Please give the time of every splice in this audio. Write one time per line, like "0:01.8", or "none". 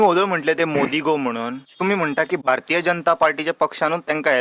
0:01.6
0:02.4